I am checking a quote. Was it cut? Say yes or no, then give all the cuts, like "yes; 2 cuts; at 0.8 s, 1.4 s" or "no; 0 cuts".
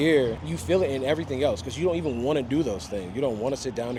no; 0 cuts